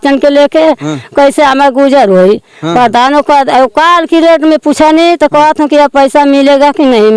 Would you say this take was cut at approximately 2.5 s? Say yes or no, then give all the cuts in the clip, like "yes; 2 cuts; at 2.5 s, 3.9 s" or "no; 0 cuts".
no; 0 cuts